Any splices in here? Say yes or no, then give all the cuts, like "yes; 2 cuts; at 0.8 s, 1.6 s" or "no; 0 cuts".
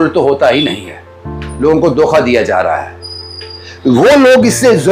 no; 0 cuts